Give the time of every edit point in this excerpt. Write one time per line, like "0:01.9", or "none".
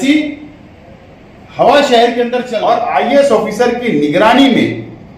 0:02.4